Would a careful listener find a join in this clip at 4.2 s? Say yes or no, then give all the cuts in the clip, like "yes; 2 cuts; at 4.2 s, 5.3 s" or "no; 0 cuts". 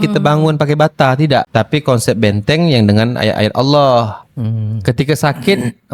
yes; 1 cut; at 4.2 s